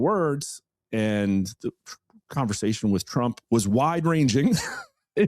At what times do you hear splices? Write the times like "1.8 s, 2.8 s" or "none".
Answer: 3.4 s